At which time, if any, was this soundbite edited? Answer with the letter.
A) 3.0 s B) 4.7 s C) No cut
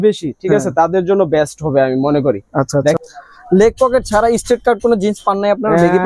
A